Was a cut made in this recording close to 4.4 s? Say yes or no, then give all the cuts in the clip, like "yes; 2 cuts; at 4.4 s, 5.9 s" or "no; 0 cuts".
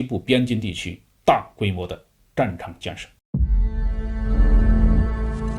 no; 1 cut; at 3.1 s